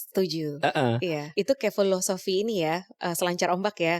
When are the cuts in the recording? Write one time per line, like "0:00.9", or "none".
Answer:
0:01.3